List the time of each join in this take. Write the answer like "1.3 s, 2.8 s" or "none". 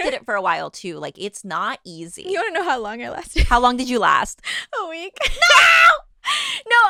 none

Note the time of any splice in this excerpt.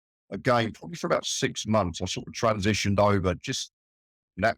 none

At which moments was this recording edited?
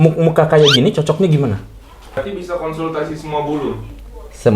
2.2 s

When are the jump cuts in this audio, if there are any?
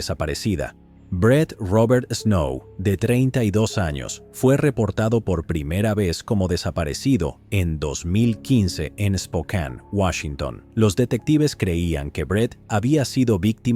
none

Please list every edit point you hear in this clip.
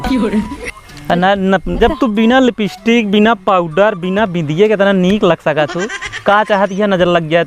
1.8 s

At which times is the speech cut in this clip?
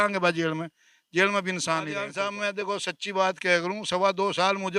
2.1 s

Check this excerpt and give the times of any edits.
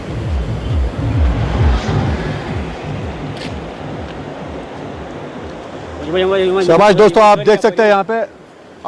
none

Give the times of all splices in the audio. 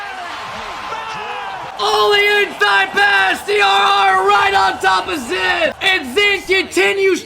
1.7 s, 5.8 s

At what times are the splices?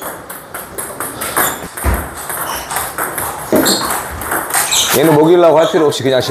1.6 s

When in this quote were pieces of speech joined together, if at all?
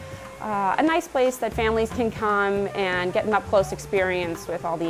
none

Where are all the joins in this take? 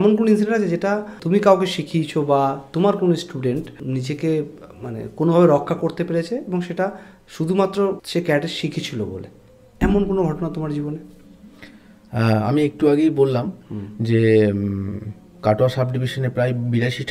1.1 s, 3.7 s, 8.0 s

